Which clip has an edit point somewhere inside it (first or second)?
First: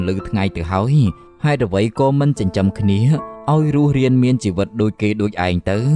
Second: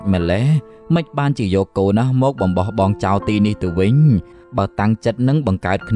second